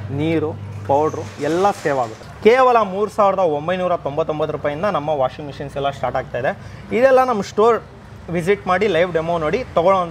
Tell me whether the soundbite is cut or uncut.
cut